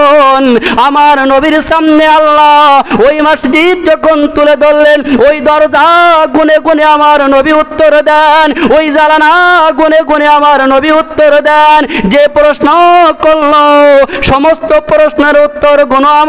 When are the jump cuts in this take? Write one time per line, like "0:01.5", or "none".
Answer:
none